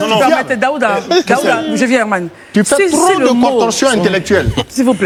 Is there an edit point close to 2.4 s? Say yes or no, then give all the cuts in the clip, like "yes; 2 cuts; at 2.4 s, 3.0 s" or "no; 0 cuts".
no; 0 cuts